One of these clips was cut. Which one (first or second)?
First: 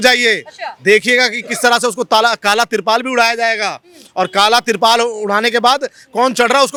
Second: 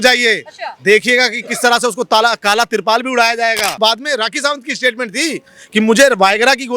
second